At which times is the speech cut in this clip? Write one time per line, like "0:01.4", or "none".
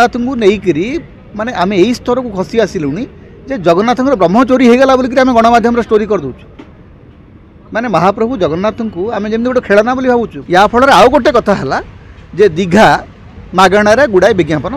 0:10.4